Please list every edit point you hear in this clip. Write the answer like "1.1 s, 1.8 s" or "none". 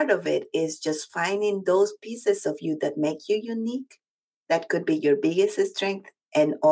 none